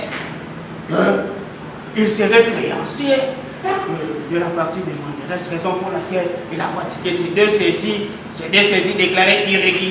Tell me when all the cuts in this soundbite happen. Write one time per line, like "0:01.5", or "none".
none